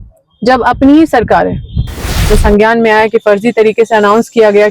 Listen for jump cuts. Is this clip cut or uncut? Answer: cut